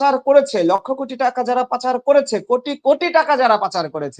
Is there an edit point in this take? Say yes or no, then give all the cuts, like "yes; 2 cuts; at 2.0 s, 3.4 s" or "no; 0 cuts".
no; 0 cuts